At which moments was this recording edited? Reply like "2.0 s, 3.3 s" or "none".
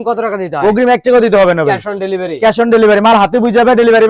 none